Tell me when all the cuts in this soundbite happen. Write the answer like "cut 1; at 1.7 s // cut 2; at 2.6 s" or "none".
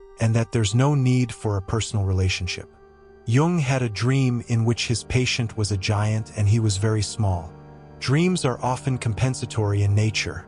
cut 1; at 3.0 s

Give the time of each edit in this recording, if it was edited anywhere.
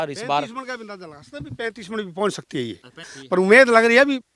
cut 1; at 3.1 s

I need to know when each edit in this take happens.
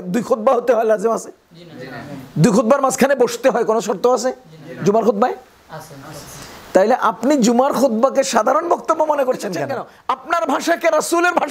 cut 1; at 9.9 s

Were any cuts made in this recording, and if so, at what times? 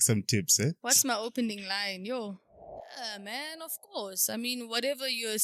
cut 1; at 2.9 s

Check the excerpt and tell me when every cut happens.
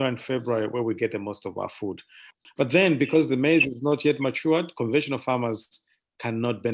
cut 1; at 2.4 s

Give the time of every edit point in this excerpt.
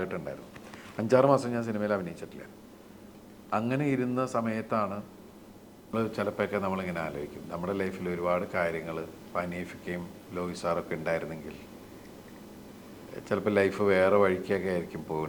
cut 1; at 5.9 s

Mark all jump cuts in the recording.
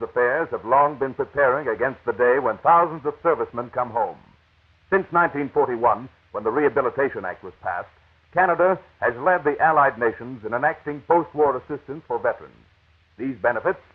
none

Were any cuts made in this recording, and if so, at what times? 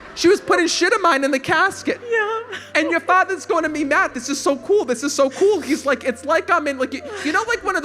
cut 1; at 2.6 s

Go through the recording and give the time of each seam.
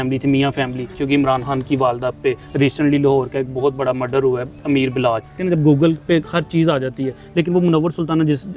cut 1; at 1.0 s // cut 2; at 2.4 s // cut 3; at 5.4 s

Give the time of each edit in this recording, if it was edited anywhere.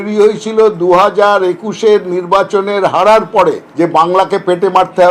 cut 1; at 3.7 s

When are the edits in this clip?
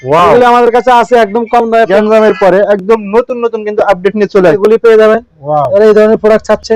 cut 1; at 1.9 s // cut 2; at 4.6 s

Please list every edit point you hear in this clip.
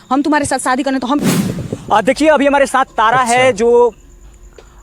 cut 1; at 1.2 s

